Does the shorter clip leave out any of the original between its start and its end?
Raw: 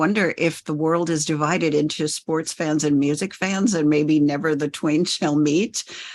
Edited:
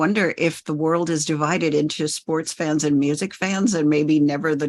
no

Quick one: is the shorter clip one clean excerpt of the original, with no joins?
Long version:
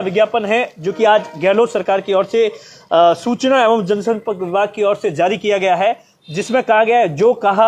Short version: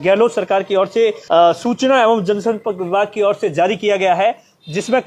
no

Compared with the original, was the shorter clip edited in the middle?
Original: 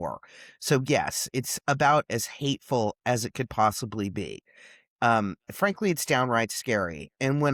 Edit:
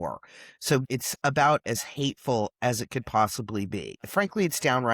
yes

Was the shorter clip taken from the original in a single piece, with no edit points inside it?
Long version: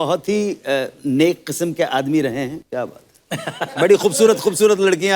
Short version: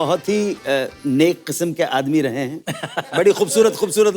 no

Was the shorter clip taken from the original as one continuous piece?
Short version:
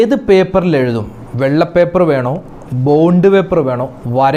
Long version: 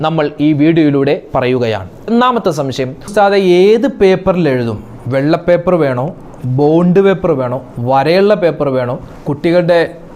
yes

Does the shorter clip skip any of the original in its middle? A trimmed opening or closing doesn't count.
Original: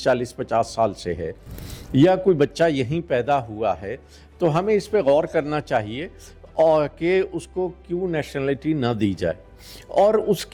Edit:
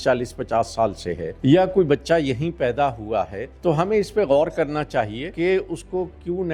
yes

